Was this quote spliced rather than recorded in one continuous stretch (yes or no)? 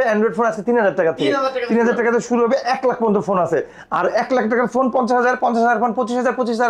no